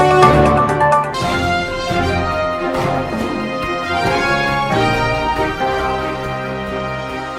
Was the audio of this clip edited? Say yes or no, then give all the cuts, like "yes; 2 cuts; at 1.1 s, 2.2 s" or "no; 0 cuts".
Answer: yes; 1 cut; at 1.0 s